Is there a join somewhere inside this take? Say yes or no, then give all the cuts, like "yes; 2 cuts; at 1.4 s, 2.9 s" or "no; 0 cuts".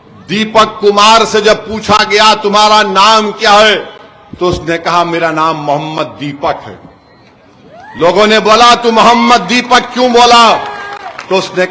no; 0 cuts